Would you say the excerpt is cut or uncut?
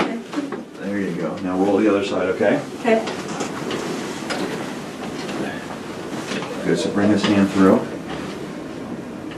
uncut